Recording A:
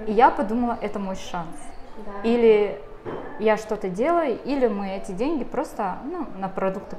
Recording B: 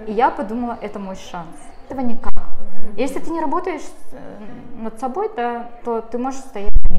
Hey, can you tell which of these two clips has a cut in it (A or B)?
B